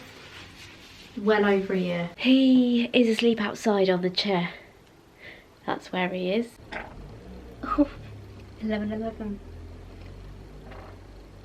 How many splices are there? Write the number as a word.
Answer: two